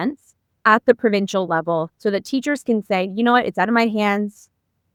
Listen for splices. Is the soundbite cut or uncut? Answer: uncut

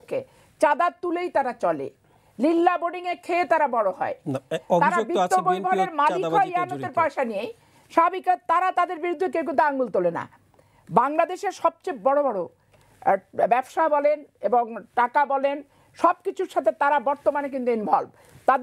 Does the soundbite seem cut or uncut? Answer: uncut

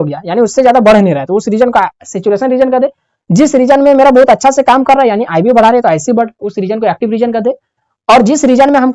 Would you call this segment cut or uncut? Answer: uncut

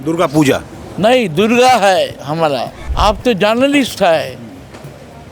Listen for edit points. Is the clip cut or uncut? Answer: cut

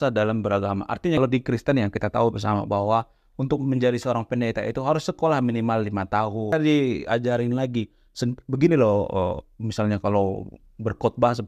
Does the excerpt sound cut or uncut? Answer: cut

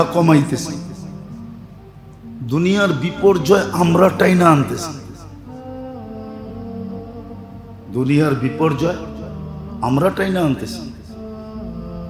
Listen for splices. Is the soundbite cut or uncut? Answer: uncut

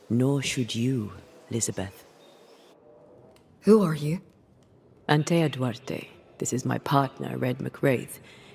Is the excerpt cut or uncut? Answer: uncut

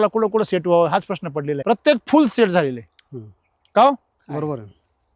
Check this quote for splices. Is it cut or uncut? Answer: cut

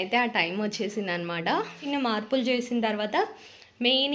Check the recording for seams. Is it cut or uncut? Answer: cut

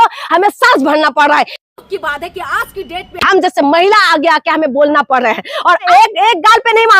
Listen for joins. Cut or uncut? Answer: cut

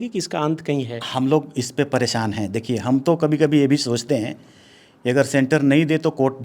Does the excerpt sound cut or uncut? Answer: uncut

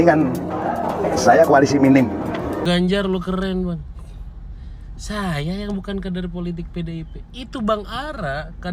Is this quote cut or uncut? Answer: cut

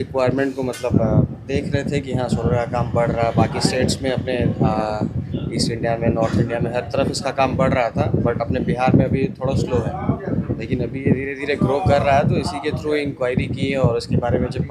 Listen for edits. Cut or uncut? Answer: uncut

